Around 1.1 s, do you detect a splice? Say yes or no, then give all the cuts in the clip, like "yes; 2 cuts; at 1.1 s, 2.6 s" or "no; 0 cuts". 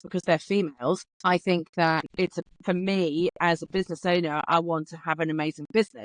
yes; 2 cuts; at 1.1 s, 2.1 s